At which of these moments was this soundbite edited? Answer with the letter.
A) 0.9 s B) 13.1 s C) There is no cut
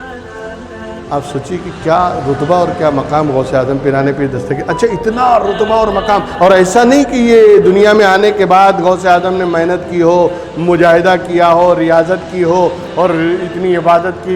A